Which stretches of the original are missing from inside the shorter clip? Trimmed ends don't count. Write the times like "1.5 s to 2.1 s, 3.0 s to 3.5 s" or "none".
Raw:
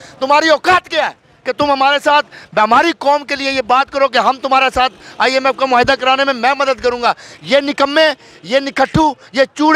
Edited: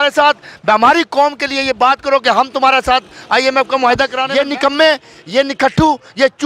6.1 s to 7.4 s